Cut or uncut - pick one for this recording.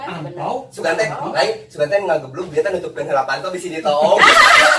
uncut